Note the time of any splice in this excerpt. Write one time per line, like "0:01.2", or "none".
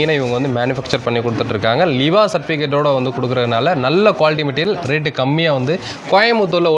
none

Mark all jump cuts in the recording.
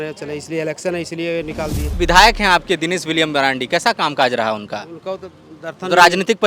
0:02.0

